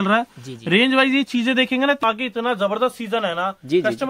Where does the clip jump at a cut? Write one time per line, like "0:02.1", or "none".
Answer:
0:02.0